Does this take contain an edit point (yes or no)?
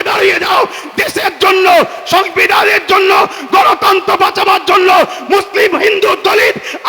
no